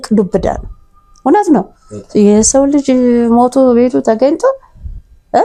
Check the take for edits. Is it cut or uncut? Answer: uncut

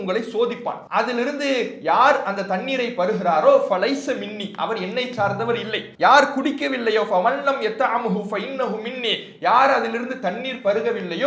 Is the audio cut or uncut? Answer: cut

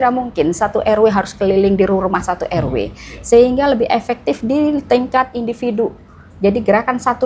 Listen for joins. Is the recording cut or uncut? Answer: uncut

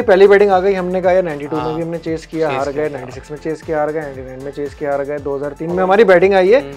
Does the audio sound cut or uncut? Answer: uncut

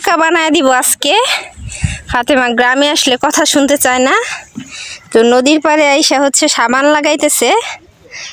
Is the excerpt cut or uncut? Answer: uncut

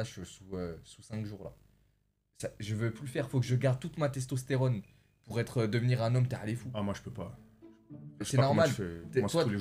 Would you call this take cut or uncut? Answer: uncut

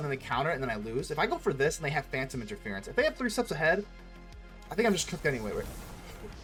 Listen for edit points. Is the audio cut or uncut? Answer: uncut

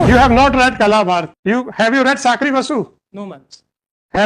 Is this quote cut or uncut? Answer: cut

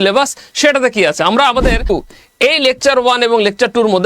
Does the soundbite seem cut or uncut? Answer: cut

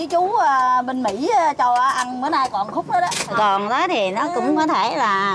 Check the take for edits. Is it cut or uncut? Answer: cut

